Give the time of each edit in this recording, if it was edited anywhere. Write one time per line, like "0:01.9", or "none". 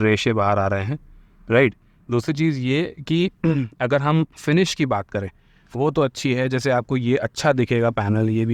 none